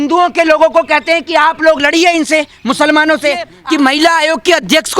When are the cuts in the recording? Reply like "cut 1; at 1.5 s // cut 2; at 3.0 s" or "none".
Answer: cut 1; at 3.5 s